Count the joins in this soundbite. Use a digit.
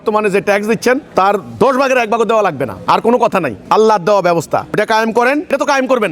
0